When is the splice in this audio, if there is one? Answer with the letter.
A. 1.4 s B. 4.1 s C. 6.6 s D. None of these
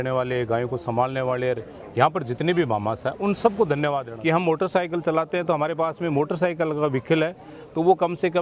B